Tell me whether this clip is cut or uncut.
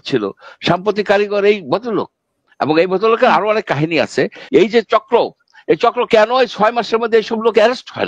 cut